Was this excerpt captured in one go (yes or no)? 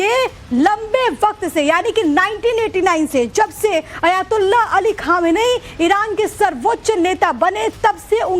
no